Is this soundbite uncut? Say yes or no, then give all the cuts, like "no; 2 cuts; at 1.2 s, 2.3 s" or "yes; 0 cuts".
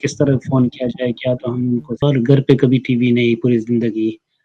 no; 1 cut; at 2.0 s